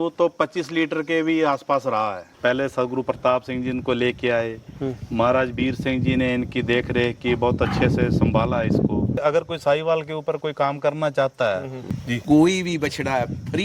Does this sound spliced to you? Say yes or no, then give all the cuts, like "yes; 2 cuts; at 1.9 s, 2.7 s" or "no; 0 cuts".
yes; 3 cuts; at 2.3 s, 9.2 s, 11.9 s